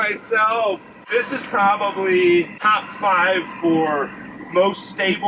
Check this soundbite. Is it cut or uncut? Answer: cut